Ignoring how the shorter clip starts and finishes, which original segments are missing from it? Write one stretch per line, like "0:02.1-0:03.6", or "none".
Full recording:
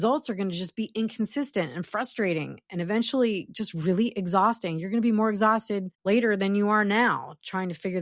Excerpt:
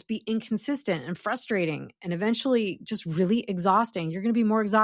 none